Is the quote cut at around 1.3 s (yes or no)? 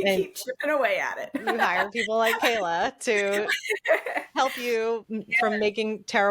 no